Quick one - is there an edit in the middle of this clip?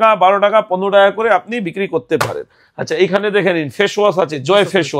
no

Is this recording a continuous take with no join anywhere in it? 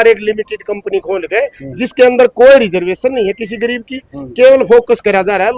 yes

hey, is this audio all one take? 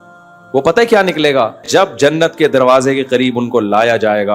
no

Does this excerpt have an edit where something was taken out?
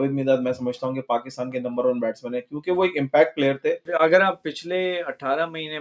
yes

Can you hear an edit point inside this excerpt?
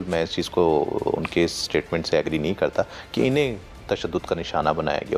no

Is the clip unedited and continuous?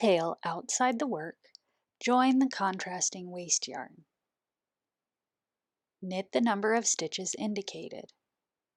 yes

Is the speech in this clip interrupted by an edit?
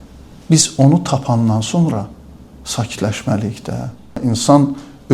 yes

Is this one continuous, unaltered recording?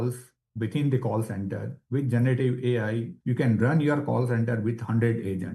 no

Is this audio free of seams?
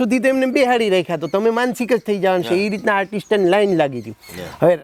yes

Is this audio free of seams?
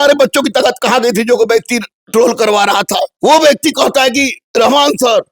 no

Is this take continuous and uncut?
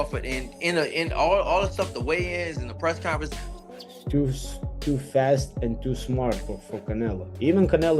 no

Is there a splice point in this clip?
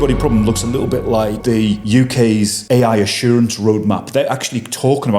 yes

